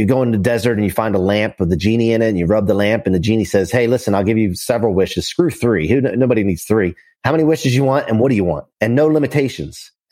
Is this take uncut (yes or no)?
yes